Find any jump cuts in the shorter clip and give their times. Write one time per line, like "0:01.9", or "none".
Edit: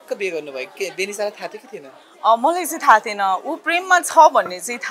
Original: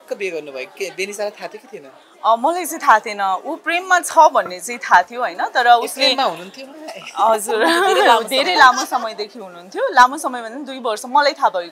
none